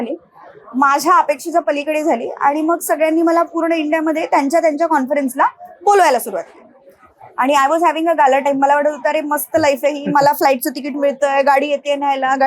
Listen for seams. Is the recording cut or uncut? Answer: uncut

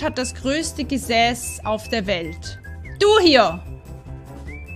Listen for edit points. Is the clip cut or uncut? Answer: uncut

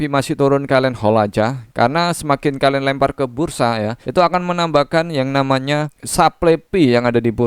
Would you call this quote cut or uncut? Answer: cut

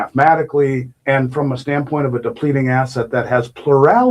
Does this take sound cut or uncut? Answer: cut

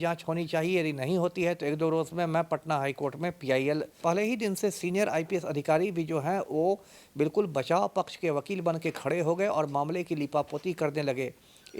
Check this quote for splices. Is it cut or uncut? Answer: cut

